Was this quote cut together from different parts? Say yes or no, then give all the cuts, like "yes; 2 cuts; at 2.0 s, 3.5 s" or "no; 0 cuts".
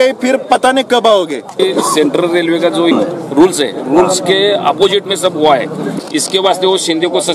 yes; 3 cuts; at 1.6 s, 2.9 s, 5.9 s